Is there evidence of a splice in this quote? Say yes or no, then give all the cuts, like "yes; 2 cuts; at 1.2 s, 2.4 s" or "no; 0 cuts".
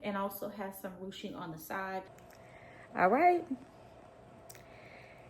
yes; 1 cut; at 2.2 s